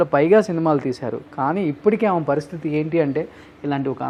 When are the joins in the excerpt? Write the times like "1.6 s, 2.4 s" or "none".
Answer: none